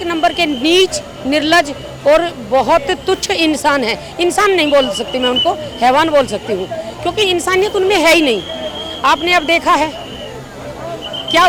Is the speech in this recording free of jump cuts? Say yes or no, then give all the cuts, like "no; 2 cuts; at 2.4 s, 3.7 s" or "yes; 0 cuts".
yes; 0 cuts